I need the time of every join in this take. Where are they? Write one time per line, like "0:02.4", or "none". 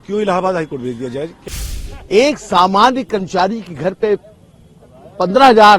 0:01.4